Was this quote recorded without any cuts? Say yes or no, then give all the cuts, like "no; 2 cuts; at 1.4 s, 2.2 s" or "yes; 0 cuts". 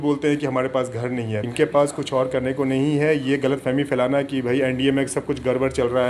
no; 1 cut; at 1.4 s